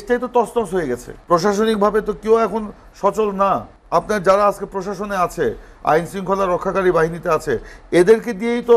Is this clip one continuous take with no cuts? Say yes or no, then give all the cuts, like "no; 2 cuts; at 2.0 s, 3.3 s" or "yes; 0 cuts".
no; 2 cuts; at 1.1 s, 3.7 s